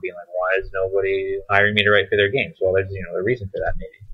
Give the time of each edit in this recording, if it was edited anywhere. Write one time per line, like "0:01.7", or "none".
0:01.4